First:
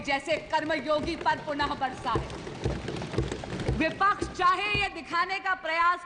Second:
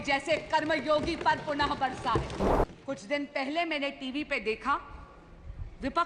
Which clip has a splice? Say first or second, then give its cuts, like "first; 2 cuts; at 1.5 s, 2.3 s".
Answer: second; 1 cut; at 2.5 s